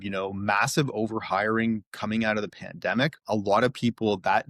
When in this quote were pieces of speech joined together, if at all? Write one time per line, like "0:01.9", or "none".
0:03.2